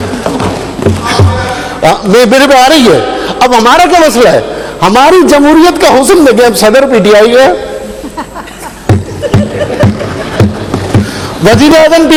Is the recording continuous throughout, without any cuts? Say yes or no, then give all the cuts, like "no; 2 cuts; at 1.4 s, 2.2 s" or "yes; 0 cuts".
yes; 0 cuts